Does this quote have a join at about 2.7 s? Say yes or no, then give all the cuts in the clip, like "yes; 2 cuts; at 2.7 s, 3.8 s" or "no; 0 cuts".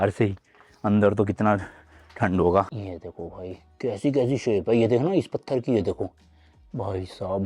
yes; 1 cut; at 2.7 s